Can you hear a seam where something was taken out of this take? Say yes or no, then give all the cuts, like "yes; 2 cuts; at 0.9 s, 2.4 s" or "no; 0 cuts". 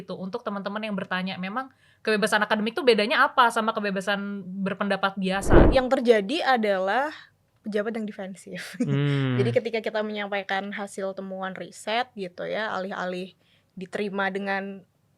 yes; 1 cut; at 5.6 s